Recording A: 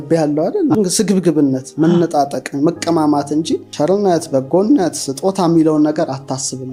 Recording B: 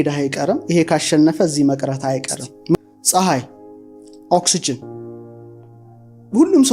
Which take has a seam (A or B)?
B